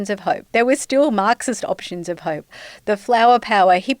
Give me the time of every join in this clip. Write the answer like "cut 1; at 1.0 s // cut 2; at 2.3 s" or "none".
cut 1; at 2.5 s